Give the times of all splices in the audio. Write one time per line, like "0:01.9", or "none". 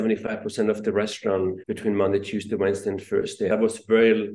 0:01.7
0:03.5